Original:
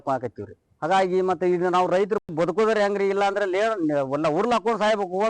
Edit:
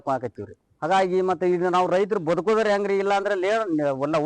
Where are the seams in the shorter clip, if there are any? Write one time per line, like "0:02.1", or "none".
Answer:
0:02.2